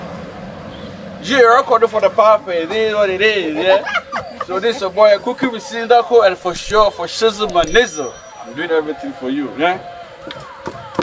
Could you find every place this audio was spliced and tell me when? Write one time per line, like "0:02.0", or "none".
none